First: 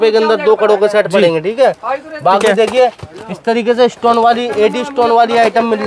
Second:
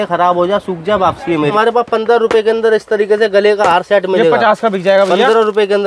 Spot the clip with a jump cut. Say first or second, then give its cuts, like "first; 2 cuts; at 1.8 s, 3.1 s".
second; 1 cut; at 1.5 s